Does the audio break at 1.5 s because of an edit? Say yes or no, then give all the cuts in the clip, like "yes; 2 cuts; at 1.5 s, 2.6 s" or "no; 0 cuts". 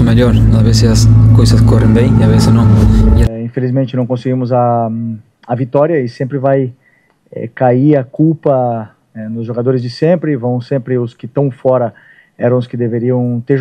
no; 1 cut; at 3.3 s